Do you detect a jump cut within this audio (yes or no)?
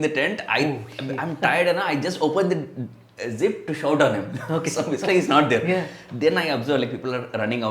no